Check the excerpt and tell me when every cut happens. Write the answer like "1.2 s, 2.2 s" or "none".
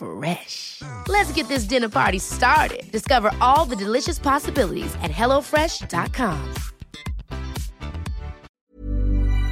8.5 s